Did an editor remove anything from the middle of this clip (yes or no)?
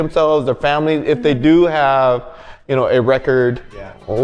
no